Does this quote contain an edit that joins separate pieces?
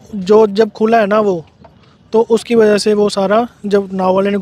no; 0 cuts

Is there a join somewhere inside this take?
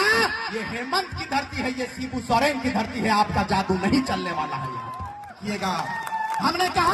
yes; 1 cut; at 5.4 s

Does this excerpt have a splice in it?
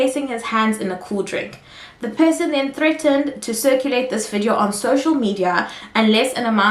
no; 0 cuts

